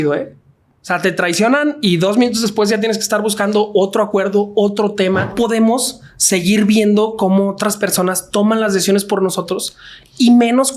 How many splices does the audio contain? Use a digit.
1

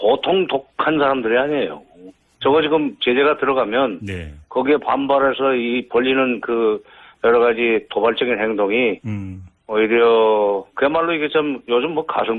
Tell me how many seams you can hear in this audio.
0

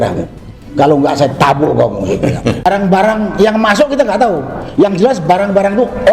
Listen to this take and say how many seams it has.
1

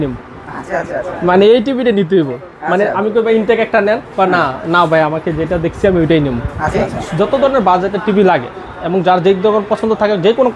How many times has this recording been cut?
1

